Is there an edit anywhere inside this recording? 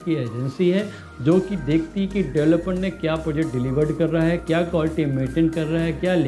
no; 0 cuts

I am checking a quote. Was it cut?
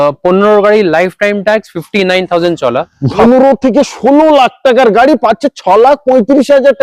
yes; 1 cut; at 3.2 s

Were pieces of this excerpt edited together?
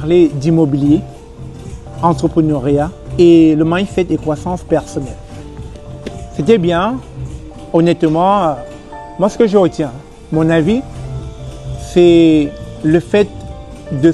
no; 0 cuts

